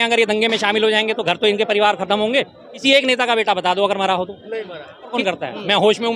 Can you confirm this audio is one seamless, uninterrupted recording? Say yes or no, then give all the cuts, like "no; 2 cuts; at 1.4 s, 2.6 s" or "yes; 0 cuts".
no; 2 cuts; at 2.7 s, 5.2 s